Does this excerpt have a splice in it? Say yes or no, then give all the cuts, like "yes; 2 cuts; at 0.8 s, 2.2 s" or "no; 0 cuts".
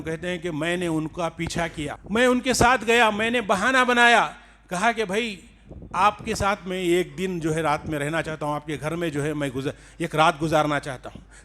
yes; 1 cut; at 2.0 s